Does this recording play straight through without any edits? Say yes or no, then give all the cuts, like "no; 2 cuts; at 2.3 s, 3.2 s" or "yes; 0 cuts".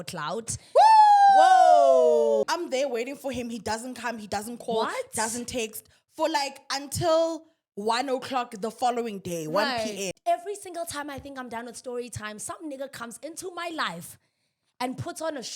no; 2 cuts; at 2.4 s, 10.1 s